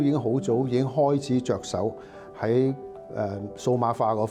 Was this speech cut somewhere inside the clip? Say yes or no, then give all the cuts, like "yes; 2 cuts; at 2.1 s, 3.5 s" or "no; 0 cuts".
no; 0 cuts